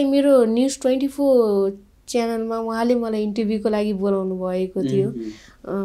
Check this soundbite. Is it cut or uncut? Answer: uncut